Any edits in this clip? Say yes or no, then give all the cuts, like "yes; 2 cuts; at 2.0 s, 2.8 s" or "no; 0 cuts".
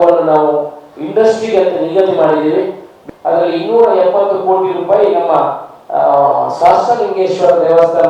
yes; 1 cut; at 2.9 s